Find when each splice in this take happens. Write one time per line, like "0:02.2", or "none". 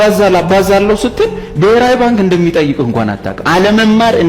none